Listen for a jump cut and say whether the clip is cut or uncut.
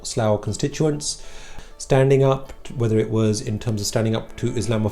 cut